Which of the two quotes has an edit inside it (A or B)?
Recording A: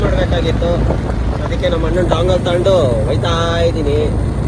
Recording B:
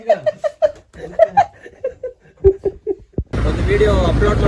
B